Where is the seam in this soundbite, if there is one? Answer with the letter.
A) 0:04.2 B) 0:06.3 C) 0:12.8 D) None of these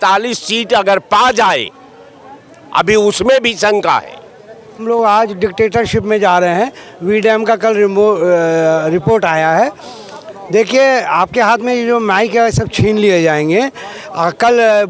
A